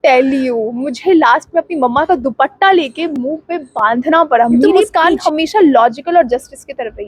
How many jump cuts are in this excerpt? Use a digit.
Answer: 1